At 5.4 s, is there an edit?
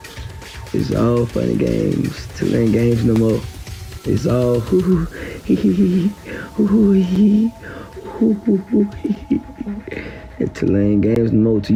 no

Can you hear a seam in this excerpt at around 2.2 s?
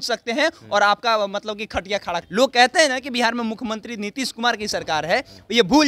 yes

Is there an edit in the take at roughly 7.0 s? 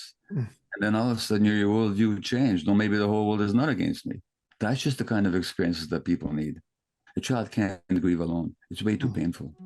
yes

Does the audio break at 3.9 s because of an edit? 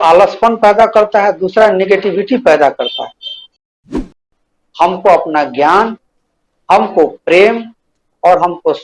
yes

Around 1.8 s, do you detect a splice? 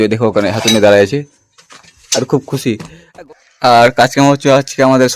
no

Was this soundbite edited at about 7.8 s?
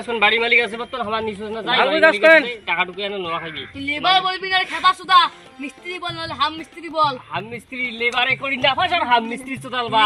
yes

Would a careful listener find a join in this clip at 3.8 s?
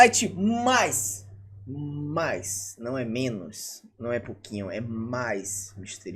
no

